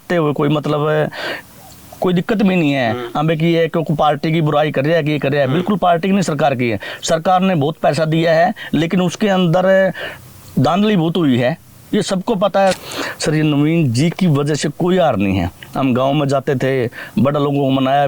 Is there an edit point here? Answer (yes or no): yes